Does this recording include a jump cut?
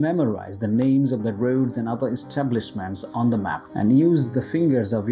no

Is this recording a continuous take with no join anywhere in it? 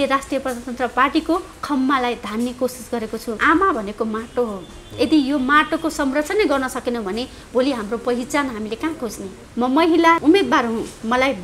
no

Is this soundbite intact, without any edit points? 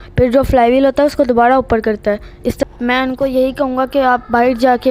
no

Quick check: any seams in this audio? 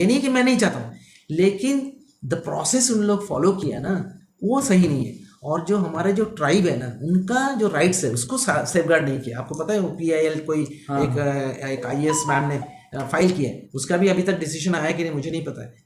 no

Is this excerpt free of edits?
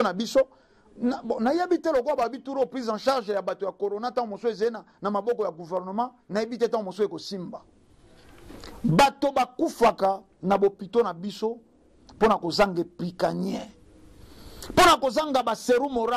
yes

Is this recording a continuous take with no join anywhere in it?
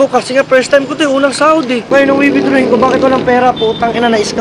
no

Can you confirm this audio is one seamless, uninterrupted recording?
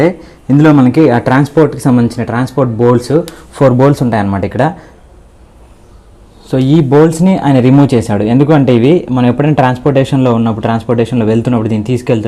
yes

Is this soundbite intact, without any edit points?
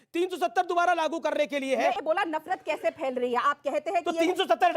no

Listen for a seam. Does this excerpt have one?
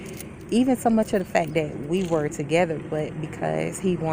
no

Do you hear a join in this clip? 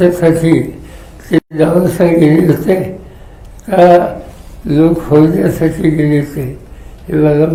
no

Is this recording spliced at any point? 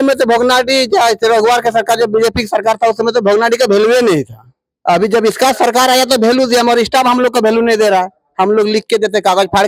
no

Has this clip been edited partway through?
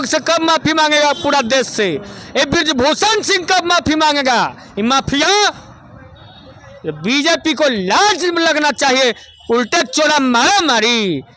no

